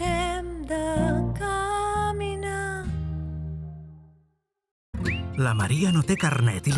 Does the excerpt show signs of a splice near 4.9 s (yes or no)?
yes